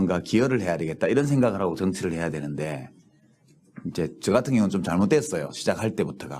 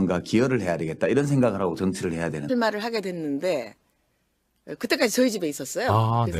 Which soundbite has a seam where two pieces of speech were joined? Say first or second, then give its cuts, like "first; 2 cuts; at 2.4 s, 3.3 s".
first; 1 cut; at 2.5 s